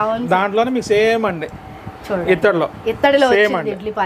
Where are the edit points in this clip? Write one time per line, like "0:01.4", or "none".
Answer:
none